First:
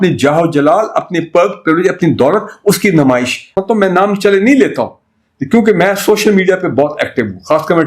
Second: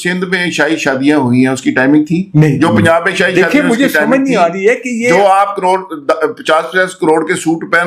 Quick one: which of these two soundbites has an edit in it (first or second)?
first